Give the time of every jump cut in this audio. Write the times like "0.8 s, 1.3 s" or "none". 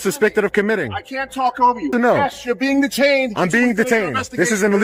1.9 s

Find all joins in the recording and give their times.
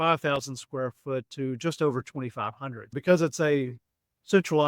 3.0 s

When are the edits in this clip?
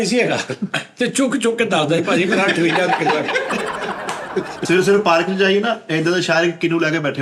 4.6 s

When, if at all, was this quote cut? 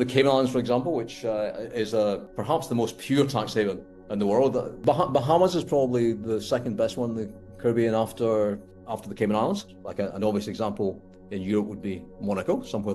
4.7 s, 8.7 s, 9.8 s

